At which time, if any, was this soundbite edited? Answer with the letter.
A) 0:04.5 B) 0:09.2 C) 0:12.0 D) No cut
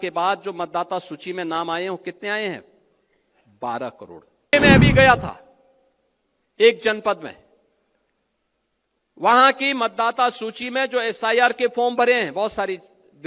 A